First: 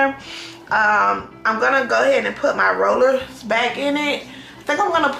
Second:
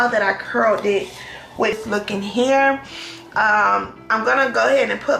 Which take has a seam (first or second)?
second